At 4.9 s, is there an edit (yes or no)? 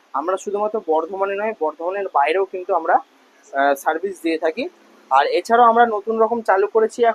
no